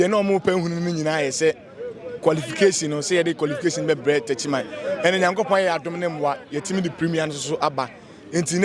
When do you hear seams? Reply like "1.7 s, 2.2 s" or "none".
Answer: none

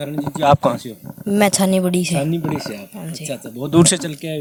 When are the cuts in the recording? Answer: none

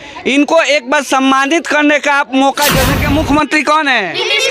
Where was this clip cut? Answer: 2.9 s

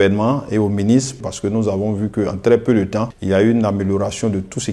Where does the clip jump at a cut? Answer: 1.3 s, 3.1 s

